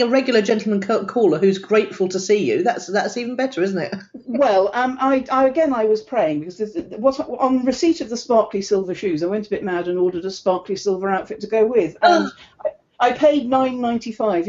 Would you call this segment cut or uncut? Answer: uncut